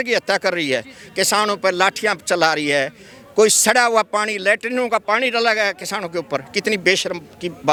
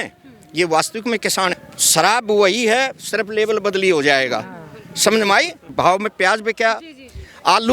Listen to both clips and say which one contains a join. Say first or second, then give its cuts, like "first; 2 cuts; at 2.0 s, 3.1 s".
second; 2 cuts; at 1.7 s, 5.6 s